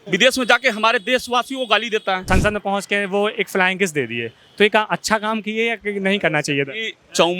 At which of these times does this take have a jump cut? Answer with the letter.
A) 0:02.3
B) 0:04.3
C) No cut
A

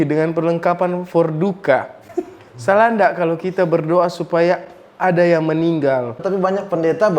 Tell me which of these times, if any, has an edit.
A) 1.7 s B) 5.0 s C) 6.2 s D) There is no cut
C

